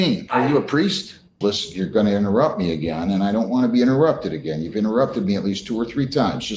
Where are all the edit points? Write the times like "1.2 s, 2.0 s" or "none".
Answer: 1.3 s